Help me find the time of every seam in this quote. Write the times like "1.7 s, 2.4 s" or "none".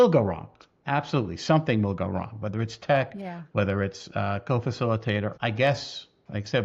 5.3 s